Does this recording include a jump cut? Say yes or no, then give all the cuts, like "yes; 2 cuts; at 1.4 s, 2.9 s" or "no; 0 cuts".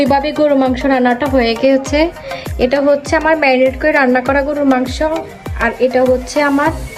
no; 0 cuts